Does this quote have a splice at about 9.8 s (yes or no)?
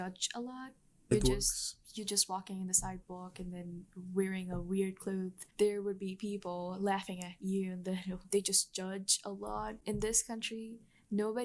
yes